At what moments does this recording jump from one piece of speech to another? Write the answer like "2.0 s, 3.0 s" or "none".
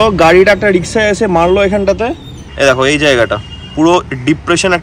2.4 s